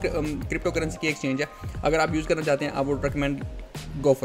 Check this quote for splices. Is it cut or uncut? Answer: uncut